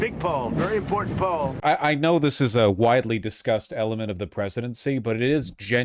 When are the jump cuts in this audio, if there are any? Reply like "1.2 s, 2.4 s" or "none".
1.5 s